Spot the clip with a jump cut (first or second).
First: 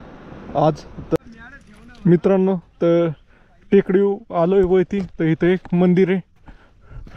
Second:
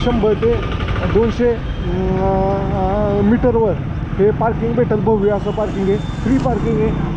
first